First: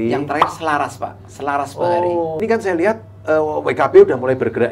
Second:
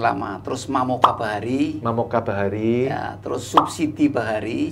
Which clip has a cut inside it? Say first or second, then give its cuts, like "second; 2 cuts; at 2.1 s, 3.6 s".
first; 1 cut; at 2.4 s